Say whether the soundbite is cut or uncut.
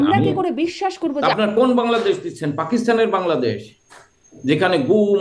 cut